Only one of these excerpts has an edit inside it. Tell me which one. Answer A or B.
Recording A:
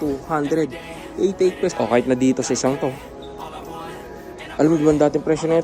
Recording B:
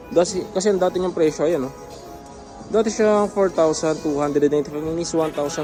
A